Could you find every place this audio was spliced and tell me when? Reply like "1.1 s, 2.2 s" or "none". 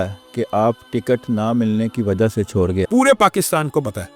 2.9 s